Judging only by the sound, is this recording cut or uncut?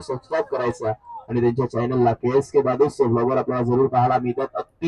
uncut